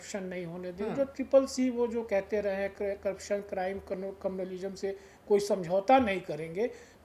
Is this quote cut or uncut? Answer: uncut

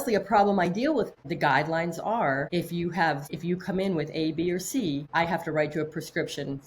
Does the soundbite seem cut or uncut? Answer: cut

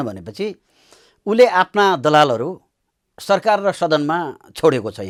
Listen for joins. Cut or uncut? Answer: uncut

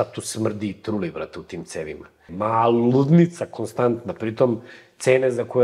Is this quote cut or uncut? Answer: cut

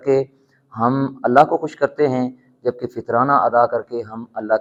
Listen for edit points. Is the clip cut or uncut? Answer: uncut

